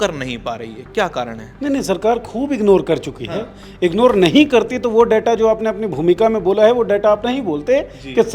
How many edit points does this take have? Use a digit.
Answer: 0